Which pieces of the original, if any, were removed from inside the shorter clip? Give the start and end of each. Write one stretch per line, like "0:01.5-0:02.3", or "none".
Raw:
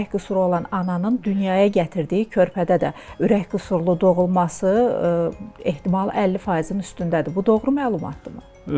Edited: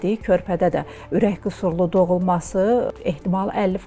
0:05.0-0:05.5